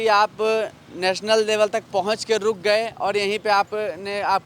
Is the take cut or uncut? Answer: uncut